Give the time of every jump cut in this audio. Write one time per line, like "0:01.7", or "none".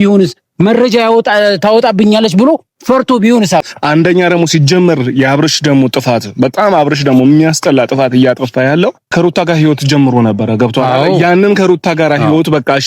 0:03.7
0:09.1